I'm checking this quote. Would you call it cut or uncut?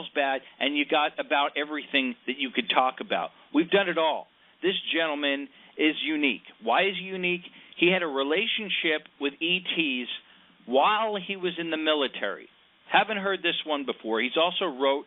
uncut